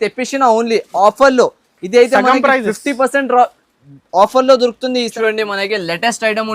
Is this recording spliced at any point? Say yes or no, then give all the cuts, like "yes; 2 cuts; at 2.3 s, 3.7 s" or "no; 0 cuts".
yes; 1 cut; at 5.1 s